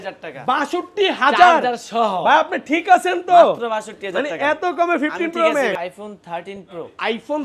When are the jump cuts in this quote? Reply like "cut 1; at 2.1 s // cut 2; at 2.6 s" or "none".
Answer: cut 1; at 5.8 s